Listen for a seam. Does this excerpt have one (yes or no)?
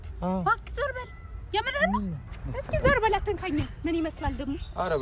yes